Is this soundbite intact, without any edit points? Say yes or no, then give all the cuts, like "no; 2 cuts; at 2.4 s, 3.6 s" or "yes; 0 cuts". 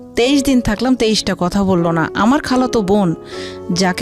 yes; 0 cuts